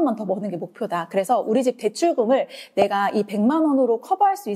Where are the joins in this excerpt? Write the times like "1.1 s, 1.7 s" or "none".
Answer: none